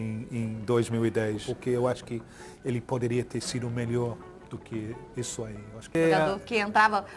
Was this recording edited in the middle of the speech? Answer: yes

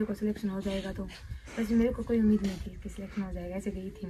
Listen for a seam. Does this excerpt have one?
no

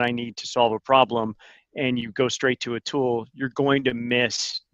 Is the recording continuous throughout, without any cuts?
yes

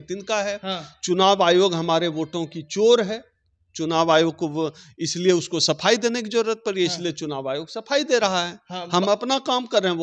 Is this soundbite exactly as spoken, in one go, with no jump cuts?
yes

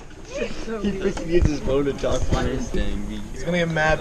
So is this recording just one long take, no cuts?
no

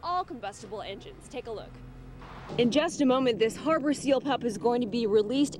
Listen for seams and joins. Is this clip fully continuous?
no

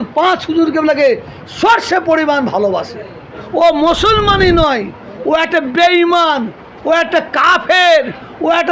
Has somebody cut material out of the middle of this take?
yes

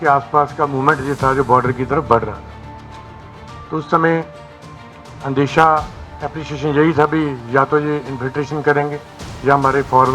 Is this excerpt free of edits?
yes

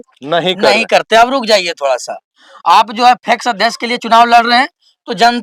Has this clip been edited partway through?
no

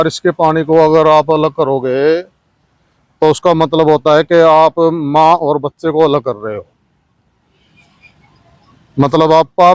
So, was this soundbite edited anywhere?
no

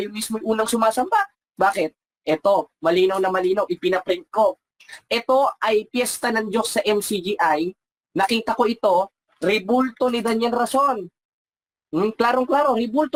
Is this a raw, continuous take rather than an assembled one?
yes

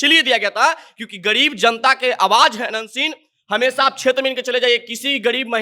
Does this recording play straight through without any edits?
yes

